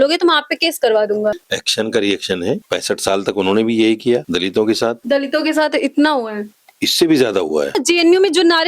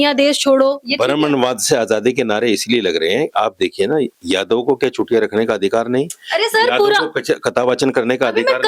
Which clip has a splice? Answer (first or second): first